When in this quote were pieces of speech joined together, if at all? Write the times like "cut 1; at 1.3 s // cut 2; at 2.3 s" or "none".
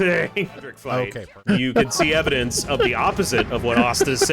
cut 1; at 1.1 s